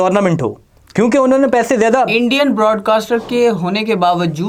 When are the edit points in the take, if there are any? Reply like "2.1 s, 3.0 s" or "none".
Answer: none